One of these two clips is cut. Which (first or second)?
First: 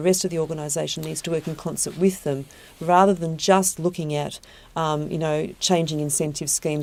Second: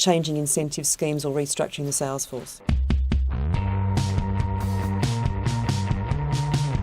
second